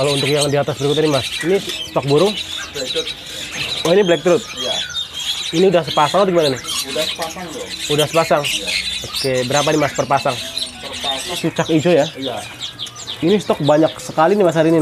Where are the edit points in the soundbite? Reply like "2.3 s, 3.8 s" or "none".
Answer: 11.4 s